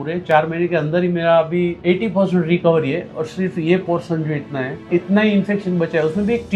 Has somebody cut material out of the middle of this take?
yes; 2 cuts; at 1.8 s, 4.8 s

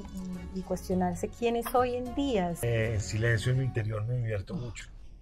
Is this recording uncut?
no; 1 cut; at 2.6 s

